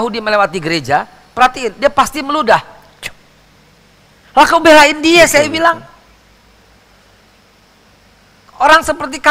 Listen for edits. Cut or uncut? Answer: uncut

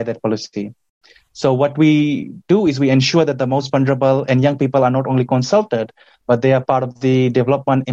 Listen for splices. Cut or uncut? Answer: uncut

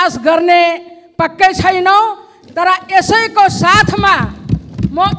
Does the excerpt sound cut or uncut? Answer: uncut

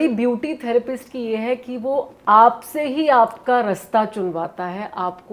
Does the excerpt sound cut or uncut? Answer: uncut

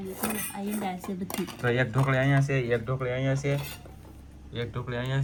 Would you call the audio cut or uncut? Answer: uncut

